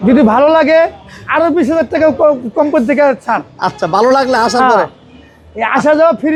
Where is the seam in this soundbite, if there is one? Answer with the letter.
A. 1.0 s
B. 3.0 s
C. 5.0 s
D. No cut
D